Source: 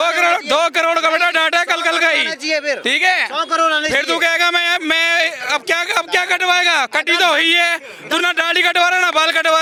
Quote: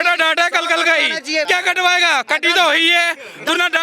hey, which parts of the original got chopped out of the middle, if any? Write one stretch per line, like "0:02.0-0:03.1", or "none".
0:02.6-0:06.1

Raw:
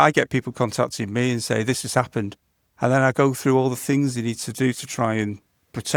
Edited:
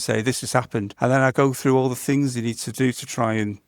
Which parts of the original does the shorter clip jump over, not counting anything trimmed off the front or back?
0:02.3-0:02.7

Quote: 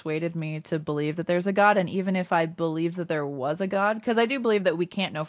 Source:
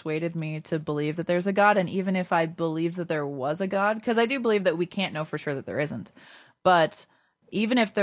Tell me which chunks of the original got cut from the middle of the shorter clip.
none

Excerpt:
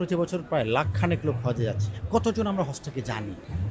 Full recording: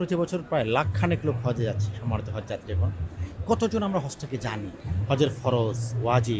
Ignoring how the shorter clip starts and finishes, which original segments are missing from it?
0:01.9-0:03.3

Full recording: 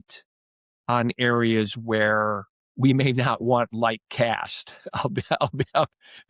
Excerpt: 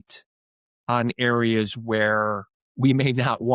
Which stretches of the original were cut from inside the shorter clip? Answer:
none

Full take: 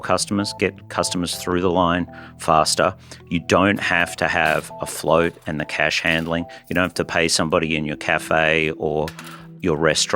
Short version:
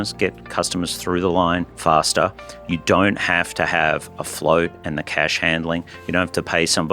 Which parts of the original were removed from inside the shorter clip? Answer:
0:02.1-0:02.3

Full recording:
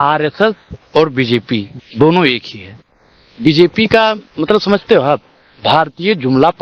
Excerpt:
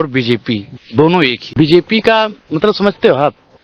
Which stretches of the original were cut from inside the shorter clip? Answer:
0:02.4-0:03.3

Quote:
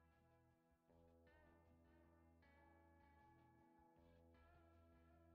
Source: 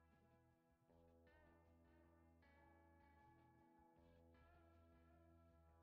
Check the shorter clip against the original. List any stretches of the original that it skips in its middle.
none

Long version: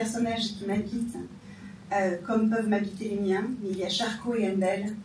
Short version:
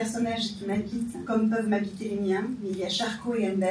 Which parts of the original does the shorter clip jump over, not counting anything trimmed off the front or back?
0:01.2-0:02.2

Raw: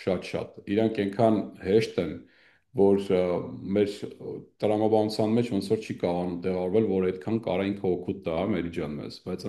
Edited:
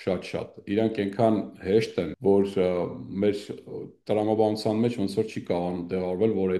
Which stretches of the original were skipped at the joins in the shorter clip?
0:02.1-0:02.7

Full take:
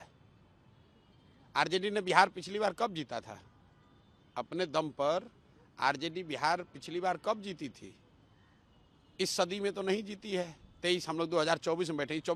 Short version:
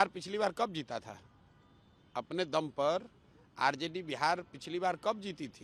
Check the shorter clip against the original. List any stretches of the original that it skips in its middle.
none

